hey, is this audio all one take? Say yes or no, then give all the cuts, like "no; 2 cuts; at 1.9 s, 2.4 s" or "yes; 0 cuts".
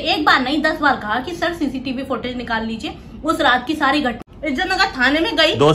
no; 1 cut; at 4.2 s